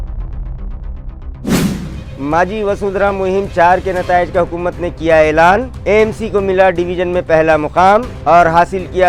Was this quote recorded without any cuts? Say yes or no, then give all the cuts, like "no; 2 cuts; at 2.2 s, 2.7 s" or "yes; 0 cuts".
yes; 0 cuts